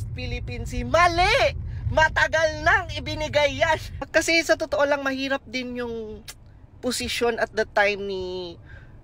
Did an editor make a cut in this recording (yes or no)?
yes